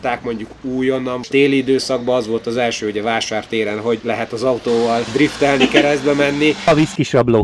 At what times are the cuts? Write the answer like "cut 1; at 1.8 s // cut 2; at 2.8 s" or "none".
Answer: cut 1; at 1.3 s // cut 2; at 4.0 s // cut 3; at 5.1 s // cut 4; at 6.7 s